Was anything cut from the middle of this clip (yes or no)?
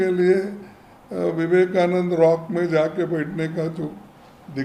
no